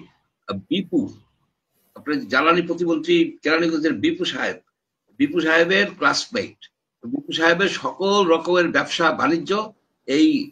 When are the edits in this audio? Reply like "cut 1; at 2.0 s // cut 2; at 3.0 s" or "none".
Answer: none